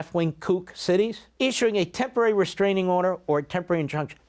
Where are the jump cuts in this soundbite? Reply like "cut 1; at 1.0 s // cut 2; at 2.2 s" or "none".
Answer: cut 1; at 1.2 s